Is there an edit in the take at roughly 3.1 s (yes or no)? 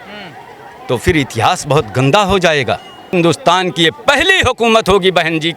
yes